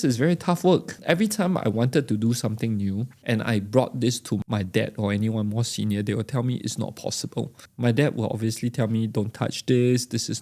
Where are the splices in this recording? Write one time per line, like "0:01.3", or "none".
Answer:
0:00.9
0:03.1
0:04.4
0:07.6